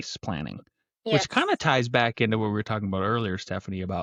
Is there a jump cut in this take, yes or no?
no